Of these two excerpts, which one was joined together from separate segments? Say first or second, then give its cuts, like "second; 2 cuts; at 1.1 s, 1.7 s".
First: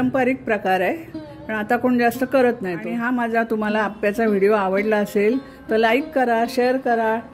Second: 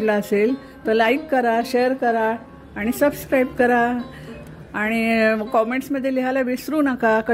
first; 1 cut; at 2.8 s